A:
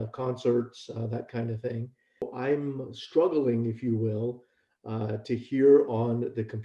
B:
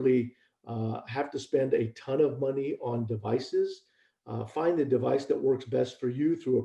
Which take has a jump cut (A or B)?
A